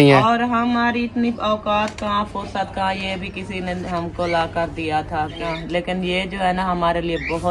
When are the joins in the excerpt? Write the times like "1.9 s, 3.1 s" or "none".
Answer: 5.7 s